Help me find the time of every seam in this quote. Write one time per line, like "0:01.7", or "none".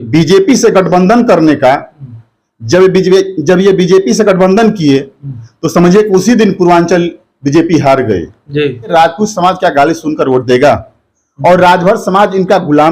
0:08.9